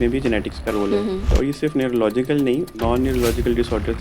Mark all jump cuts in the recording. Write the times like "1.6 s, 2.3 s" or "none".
1.3 s, 2.7 s

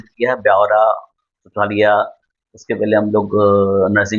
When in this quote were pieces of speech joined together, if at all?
none

